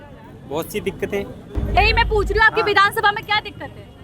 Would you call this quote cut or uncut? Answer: cut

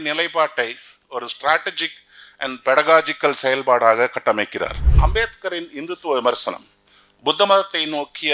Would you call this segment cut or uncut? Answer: cut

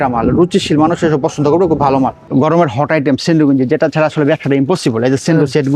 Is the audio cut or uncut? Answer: cut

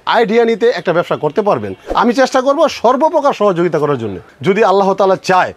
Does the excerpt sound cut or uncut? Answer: cut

